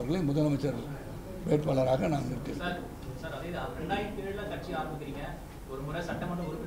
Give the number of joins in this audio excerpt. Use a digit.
0